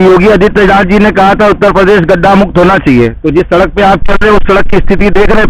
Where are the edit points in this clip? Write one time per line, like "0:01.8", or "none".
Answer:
none